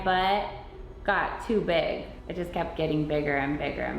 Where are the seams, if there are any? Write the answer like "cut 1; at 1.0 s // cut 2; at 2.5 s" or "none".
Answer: cut 1; at 2.2 s